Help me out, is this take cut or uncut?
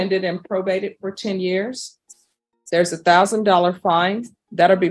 uncut